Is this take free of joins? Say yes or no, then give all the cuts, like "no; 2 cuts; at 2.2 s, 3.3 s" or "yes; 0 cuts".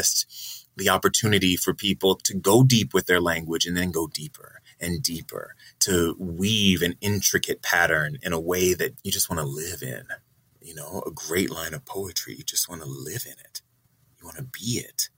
yes; 0 cuts